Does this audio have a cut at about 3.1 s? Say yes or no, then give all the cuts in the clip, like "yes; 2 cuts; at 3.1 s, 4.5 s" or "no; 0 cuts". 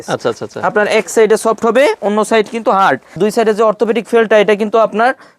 yes; 1 cut; at 3.1 s